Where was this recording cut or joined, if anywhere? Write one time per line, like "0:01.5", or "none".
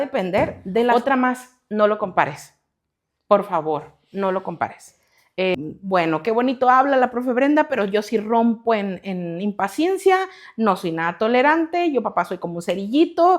0:00.9
0:05.5